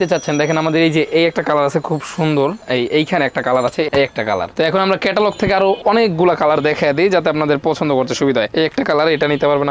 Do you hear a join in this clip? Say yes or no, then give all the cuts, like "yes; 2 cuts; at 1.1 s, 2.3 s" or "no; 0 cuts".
yes; 1 cut; at 3.9 s